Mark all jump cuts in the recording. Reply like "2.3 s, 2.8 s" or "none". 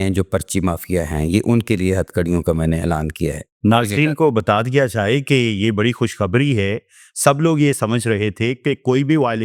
none